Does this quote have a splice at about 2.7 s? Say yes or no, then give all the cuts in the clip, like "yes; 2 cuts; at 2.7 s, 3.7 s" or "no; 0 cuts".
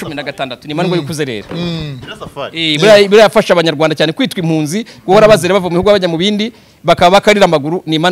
no; 0 cuts